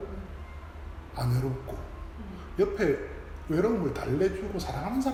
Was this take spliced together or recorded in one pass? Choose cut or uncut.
uncut